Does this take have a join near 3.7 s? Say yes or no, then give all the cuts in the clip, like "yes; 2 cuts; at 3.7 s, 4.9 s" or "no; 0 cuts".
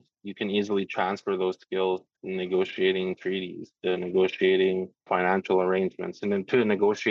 no; 2 cuts; at 2.1 s, 4.9 s